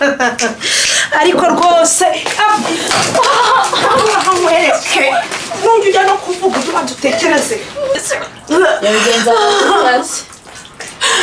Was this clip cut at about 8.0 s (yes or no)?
yes